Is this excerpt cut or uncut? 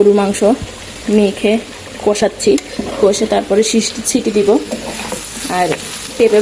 uncut